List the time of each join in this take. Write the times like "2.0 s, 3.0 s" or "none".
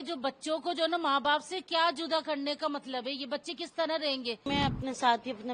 4.5 s